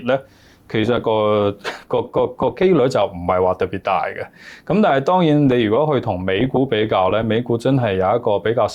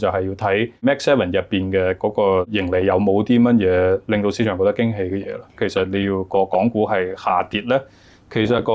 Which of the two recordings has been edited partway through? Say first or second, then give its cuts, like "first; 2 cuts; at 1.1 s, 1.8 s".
second; 3 cuts; at 0.8 s, 2.5 s, 5.6 s